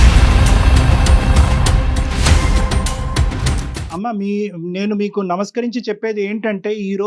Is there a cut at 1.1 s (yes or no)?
no